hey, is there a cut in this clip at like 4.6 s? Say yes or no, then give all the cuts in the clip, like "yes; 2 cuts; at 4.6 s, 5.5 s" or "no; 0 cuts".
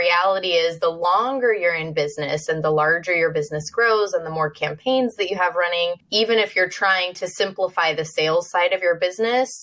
no; 1 cut; at 6.0 s